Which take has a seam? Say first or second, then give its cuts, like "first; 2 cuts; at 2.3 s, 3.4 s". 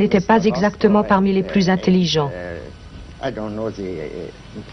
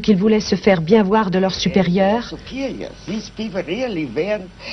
second; 1 cut; at 2.2 s